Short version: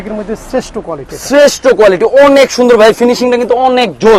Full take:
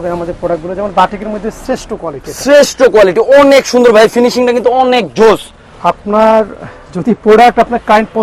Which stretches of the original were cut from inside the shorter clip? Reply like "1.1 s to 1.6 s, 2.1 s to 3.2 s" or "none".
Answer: none